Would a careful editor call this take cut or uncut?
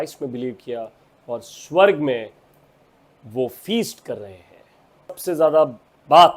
cut